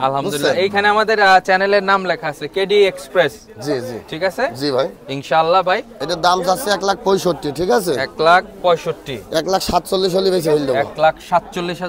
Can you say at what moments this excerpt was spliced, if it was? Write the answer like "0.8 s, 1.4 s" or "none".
5.9 s